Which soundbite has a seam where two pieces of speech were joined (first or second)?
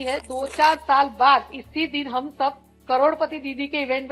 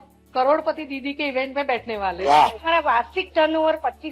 second